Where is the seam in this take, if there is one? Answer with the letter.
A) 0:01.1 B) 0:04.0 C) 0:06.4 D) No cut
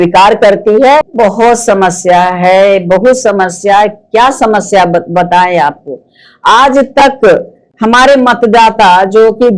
A